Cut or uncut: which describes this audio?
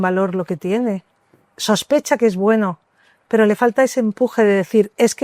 uncut